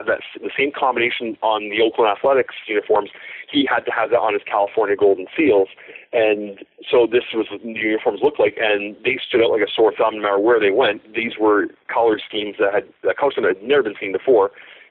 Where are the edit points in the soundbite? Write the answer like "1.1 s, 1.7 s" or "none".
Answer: none